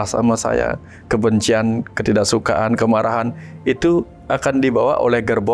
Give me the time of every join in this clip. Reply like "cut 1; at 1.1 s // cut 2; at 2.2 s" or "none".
cut 1; at 1.9 s